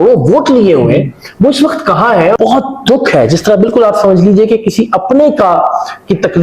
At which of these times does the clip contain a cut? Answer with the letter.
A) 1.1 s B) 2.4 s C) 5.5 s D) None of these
B